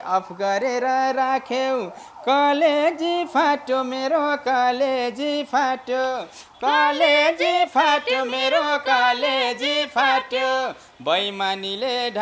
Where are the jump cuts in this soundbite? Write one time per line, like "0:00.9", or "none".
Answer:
none